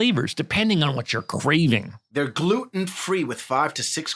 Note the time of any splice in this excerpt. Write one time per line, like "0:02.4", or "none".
none